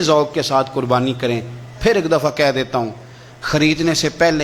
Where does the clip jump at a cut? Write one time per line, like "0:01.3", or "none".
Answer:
none